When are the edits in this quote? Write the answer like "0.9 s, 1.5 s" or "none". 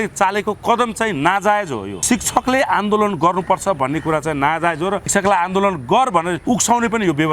1.9 s, 5.1 s, 6.4 s